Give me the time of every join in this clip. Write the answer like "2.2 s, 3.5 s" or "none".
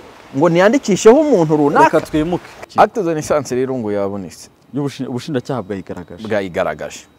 2.6 s